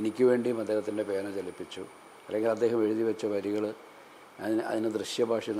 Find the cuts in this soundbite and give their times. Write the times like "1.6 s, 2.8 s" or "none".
none